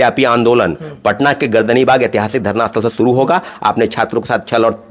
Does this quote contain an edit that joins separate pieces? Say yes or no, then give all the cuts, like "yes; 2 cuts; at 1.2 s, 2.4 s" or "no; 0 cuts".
yes; 1 cut; at 3.5 s